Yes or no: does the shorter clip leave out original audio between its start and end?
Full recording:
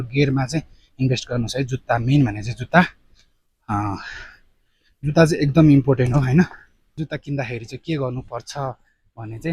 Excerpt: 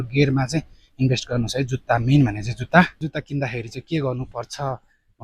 yes